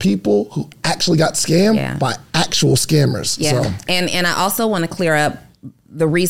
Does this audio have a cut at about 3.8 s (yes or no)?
no